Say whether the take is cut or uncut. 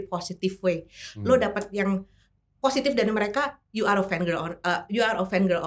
uncut